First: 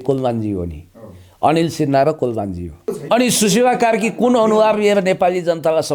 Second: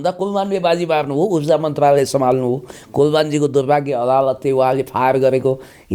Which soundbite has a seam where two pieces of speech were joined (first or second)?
first